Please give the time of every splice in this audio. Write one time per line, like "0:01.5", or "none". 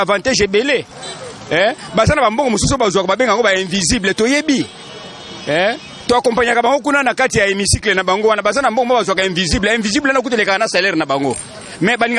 none